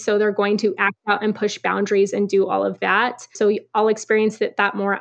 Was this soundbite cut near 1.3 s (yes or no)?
no